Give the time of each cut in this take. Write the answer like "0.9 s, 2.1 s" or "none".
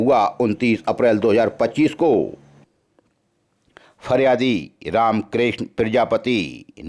2.6 s